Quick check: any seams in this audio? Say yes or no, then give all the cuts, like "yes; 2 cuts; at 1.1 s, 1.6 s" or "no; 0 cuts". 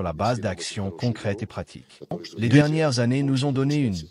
yes; 1 cut; at 2.3 s